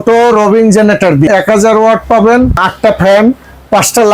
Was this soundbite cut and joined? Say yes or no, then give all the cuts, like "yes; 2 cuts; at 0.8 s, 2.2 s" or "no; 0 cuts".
yes; 1 cut; at 1.3 s